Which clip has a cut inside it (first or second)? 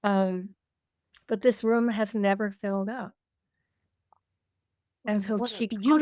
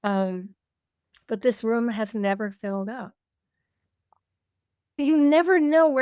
second